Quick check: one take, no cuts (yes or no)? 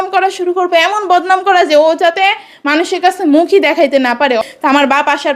no